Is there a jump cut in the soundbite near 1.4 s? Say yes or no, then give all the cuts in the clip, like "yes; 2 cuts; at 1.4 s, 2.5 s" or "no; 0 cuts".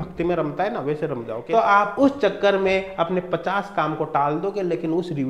yes; 1 cut; at 1.4 s